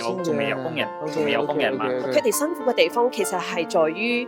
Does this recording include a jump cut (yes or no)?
yes